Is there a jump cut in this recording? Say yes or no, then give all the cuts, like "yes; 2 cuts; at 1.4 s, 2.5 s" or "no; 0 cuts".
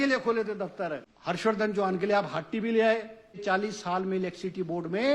yes; 2 cuts; at 1.1 s, 3.4 s